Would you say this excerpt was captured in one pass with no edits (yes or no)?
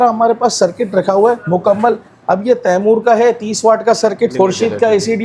no